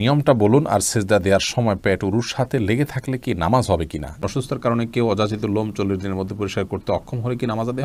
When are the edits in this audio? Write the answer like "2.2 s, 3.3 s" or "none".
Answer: 4.2 s

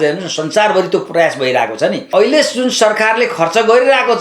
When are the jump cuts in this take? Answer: 2.0 s

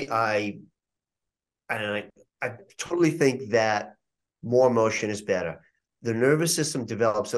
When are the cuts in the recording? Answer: none

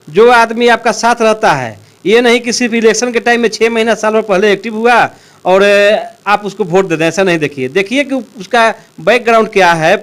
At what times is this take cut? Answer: none

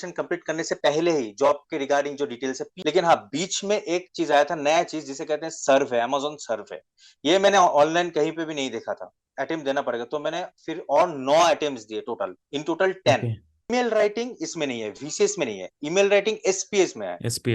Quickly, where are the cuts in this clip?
2.7 s, 9.2 s, 13.7 s

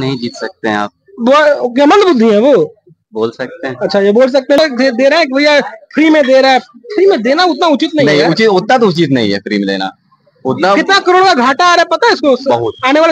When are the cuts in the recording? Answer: 4.6 s

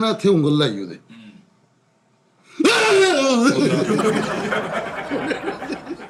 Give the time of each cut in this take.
none

